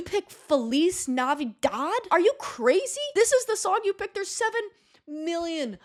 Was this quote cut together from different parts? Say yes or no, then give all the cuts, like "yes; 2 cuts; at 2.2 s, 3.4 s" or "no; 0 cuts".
no; 0 cuts